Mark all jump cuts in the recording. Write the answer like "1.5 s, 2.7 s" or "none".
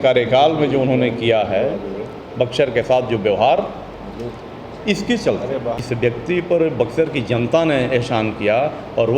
5.8 s